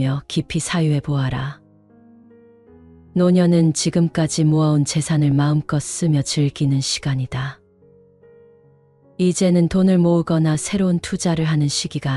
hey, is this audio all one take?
no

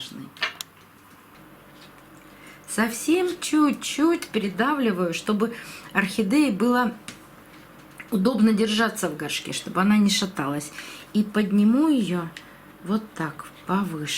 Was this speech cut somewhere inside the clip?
yes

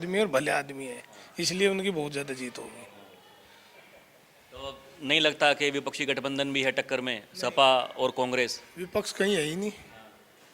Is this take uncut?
yes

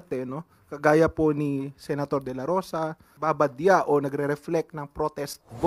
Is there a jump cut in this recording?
yes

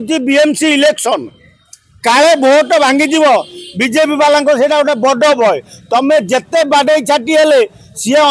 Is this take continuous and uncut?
yes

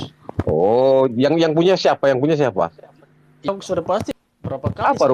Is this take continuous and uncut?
no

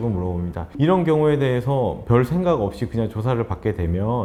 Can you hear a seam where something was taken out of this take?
no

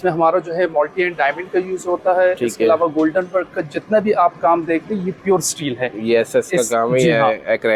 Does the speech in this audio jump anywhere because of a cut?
no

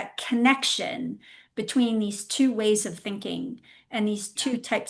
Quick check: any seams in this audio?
no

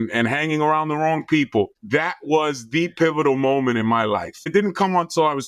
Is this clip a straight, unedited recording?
no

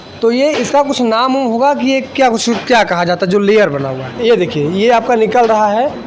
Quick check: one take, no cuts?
no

